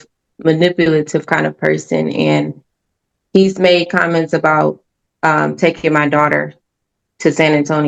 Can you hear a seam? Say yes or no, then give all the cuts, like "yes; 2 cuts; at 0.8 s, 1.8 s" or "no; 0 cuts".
no; 0 cuts